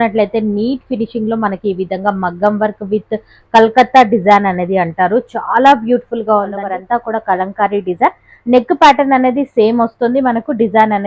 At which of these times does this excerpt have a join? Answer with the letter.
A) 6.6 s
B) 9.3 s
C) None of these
A